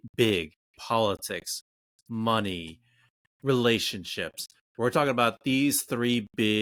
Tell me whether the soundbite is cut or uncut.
uncut